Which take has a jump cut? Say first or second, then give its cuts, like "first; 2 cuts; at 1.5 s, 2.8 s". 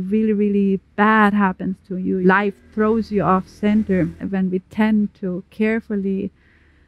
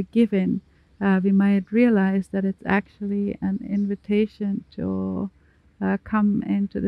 first; 2 cuts; at 2.2 s, 4.2 s